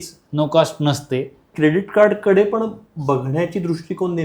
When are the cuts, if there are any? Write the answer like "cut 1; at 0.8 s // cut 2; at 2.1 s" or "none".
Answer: cut 1; at 1.5 s